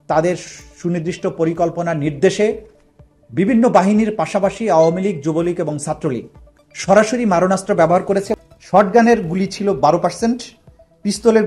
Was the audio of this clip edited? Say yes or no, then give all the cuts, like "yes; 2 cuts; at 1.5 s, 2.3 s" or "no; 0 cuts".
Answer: yes; 1 cut; at 8.4 s